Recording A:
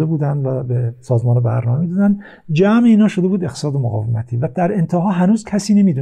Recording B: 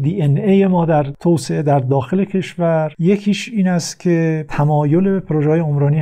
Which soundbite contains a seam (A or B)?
B